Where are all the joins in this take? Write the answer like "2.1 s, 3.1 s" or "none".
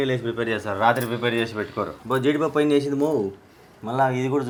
none